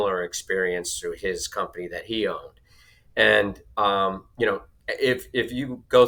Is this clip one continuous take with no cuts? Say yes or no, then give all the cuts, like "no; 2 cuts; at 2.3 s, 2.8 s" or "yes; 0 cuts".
yes; 0 cuts